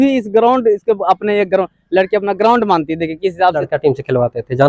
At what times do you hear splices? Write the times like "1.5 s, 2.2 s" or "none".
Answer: 3.6 s